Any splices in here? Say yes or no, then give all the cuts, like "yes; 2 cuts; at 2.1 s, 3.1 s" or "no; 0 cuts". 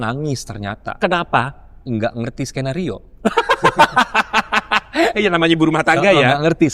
no; 0 cuts